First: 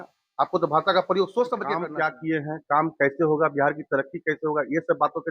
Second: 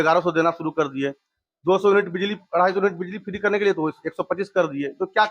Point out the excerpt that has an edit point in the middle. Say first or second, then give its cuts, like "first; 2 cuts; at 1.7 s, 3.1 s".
first; 1 cut; at 1.8 s